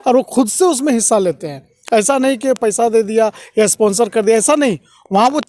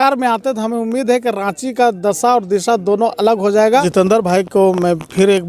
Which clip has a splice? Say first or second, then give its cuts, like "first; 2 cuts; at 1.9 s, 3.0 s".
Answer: second; 1 cut; at 3.9 s